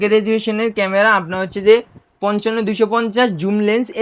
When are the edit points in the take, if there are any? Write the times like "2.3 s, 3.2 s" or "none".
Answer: none